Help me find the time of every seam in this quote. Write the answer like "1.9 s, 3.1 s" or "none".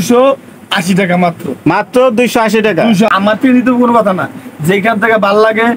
3.1 s

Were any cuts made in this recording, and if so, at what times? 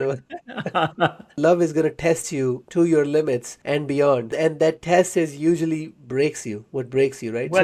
1.4 s, 2.6 s, 3.5 s, 4.3 s

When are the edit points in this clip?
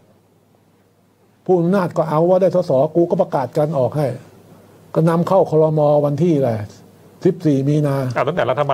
none

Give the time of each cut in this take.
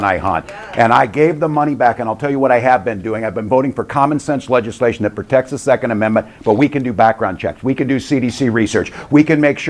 5.2 s

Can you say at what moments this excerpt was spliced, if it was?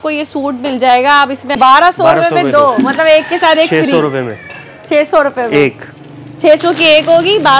1.5 s

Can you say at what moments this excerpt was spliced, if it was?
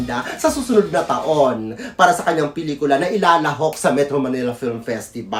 none

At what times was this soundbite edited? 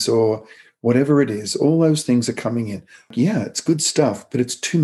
3.1 s

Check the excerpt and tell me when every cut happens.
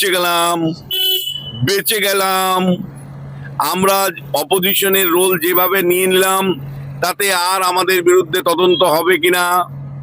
none

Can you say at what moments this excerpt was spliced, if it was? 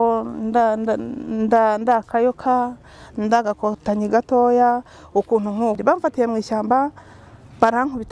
5.8 s

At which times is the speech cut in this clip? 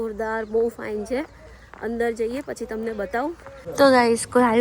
3.6 s

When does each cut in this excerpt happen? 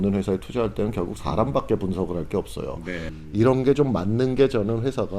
3.1 s

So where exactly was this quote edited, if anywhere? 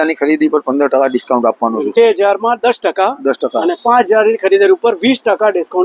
2.0 s

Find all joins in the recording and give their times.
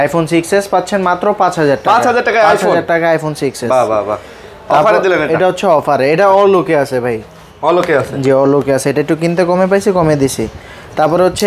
none

